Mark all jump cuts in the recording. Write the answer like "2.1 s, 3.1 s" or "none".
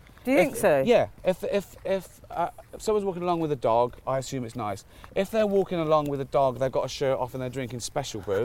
none